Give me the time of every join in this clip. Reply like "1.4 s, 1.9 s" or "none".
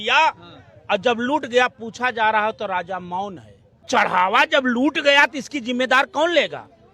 3.9 s